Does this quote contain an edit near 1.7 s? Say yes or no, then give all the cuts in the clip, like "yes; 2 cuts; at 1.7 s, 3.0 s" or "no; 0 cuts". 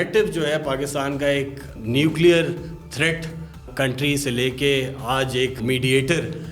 yes; 3 cuts; at 1.7 s, 3.7 s, 5.6 s